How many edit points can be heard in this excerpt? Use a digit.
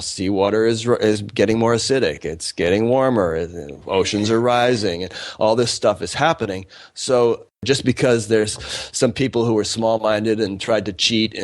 1